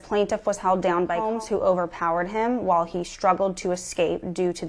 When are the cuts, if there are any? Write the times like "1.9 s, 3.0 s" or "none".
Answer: 1.3 s